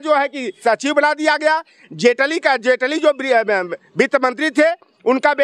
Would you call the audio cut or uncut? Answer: uncut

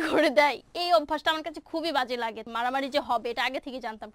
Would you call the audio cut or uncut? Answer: cut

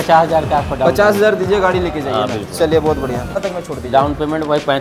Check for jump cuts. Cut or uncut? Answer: cut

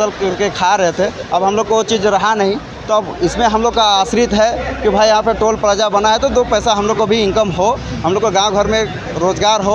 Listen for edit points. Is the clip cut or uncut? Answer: uncut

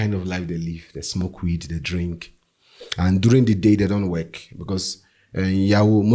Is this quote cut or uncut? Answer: uncut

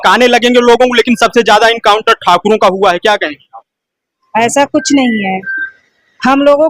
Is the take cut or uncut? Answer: uncut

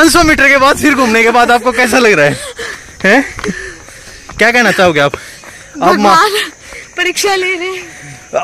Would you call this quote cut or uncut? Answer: uncut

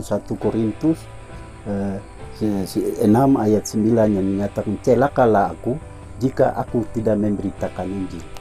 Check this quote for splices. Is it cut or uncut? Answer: uncut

